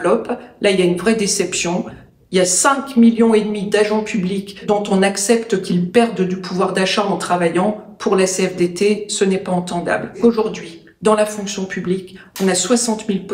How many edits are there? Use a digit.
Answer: 2